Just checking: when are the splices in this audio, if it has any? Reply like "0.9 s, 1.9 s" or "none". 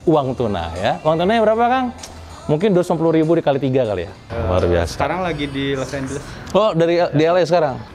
4.3 s